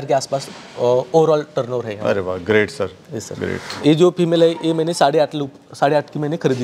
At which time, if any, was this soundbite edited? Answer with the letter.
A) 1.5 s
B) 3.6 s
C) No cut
B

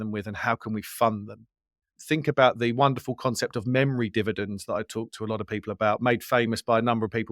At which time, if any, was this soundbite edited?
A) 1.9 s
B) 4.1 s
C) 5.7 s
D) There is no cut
A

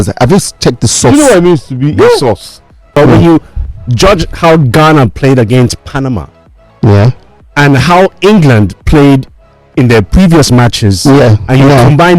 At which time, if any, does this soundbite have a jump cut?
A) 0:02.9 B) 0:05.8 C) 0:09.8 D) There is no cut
A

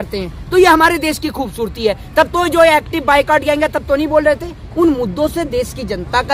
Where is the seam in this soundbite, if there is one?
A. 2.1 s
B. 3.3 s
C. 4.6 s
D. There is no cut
C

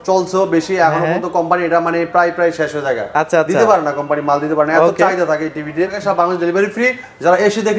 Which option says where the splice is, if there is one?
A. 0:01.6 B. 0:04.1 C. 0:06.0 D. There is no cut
C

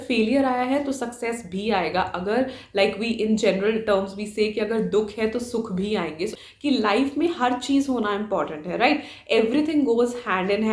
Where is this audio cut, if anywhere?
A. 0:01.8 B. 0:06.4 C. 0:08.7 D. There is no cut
B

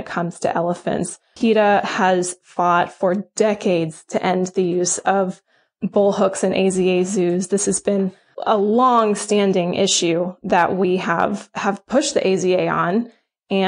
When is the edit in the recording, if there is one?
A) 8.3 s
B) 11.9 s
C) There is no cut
A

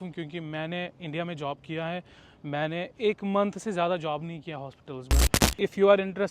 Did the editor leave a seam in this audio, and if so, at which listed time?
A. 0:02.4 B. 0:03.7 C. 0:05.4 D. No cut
C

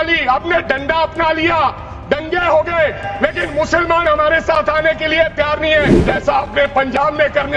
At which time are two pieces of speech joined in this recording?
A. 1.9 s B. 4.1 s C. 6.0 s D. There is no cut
C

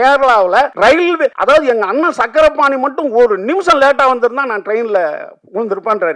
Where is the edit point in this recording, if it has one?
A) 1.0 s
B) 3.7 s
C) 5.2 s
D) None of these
A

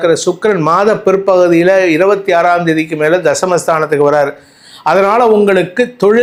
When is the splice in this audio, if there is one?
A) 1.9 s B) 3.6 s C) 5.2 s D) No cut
D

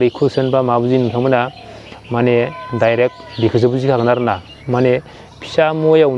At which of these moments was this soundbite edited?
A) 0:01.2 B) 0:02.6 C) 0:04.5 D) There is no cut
D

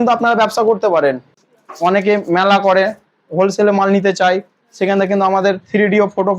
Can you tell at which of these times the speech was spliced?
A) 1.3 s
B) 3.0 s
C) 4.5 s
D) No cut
A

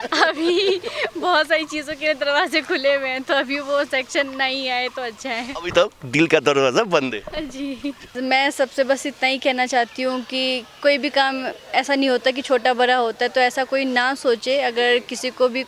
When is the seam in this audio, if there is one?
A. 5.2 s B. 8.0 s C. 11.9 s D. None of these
B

